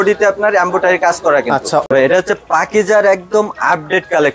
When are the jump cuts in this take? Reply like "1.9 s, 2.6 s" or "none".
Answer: 1.8 s